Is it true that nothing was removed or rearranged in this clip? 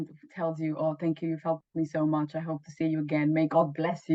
yes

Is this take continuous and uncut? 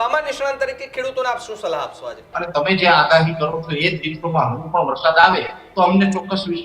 no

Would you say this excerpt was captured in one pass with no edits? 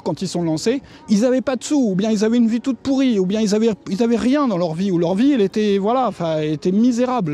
no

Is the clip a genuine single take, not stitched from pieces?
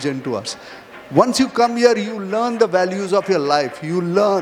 yes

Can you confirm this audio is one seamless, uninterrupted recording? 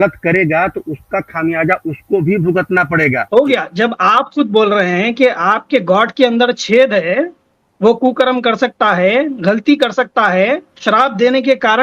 no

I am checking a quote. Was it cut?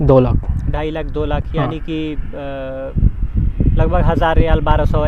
no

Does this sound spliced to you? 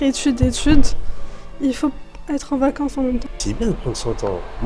yes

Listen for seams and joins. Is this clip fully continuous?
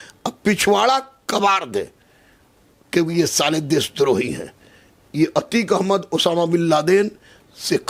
yes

